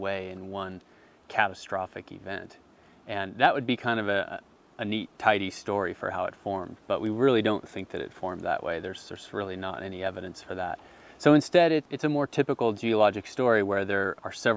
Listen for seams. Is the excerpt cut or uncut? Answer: uncut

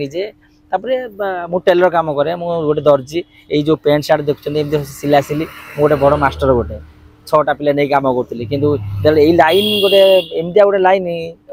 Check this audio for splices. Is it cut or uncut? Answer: uncut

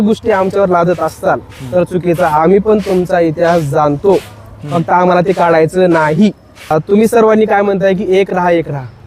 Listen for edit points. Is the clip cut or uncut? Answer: cut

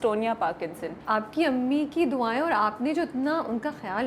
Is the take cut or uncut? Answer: cut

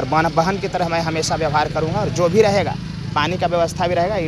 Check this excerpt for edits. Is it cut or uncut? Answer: uncut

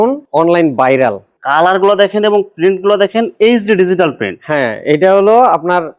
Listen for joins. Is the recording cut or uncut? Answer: uncut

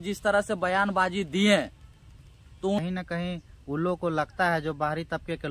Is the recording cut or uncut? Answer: cut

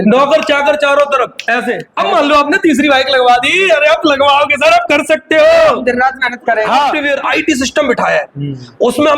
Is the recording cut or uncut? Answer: cut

